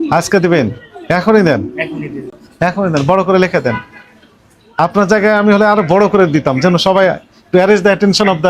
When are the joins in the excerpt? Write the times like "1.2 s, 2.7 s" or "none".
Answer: none

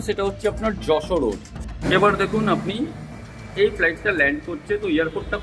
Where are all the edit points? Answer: 1.6 s

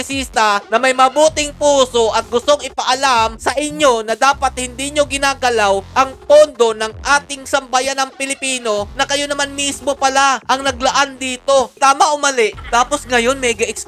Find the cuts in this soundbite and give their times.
11.8 s, 12.6 s

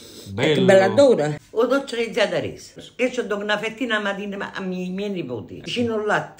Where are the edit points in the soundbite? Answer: 1.4 s, 2.8 s

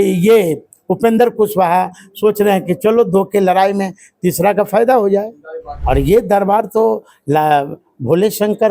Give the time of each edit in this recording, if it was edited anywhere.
5.8 s

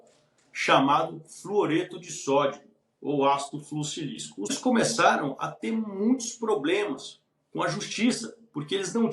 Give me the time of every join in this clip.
4.6 s

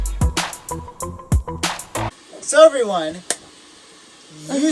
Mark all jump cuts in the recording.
2.2 s

